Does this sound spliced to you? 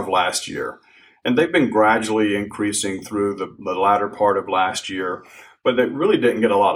no; 0 cuts

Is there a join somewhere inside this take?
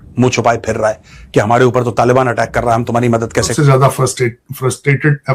yes; 1 cut; at 3.5 s

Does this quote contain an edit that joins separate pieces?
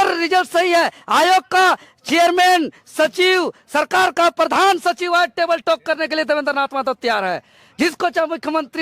no; 0 cuts

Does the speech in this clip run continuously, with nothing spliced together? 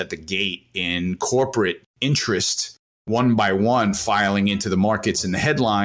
no; 2 cuts; at 1.9 s, 3.1 s

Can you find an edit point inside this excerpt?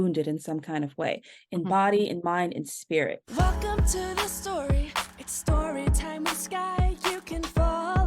yes; 1 cut; at 3.2 s

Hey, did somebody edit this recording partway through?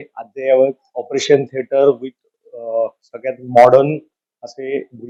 no; 0 cuts

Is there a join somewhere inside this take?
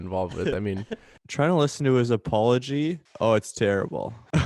yes; 2 cuts; at 1.1 s, 3.1 s

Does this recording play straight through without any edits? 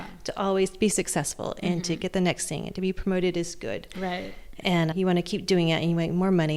yes; 0 cuts

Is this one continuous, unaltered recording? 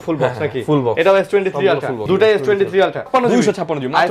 no; 2 cuts; at 1.9 s, 3.1 s

